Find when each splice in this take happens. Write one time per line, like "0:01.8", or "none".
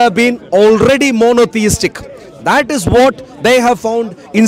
none